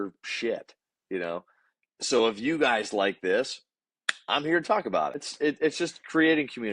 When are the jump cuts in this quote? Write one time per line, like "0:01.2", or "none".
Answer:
0:05.3